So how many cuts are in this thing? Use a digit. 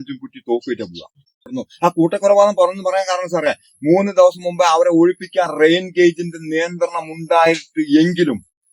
1